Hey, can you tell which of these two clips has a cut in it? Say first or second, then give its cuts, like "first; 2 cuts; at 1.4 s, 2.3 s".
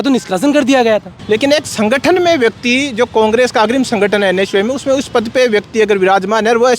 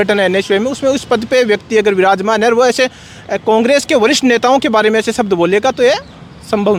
first; 1 cut; at 1.1 s